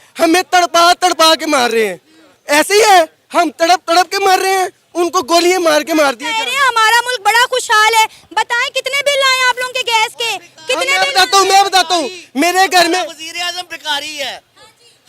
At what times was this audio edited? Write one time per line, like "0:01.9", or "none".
none